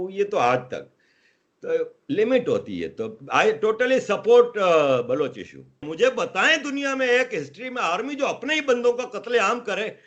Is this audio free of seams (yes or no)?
no